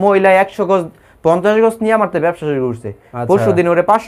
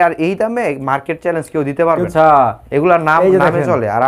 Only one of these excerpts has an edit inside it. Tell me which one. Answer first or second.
second